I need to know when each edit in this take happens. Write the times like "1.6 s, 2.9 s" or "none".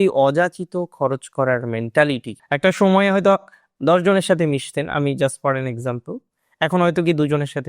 2.3 s